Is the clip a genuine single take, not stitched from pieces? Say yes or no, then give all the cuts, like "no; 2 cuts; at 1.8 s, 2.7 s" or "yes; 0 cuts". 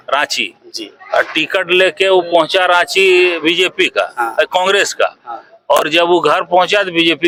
yes; 0 cuts